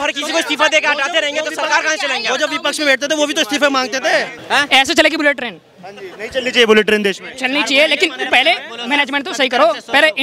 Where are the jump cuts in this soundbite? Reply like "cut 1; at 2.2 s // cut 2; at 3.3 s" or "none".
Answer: cut 1; at 4.4 s